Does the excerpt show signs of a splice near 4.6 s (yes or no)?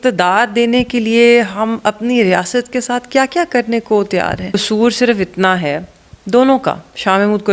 yes